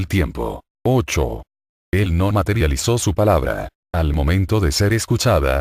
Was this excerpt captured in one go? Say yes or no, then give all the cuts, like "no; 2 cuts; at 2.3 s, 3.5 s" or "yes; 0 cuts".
no; 1 cut; at 2.1 s